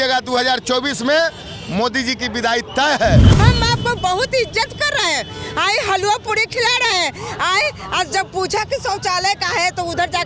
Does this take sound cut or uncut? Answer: cut